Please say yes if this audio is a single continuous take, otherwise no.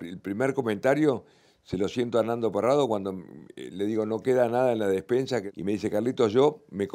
no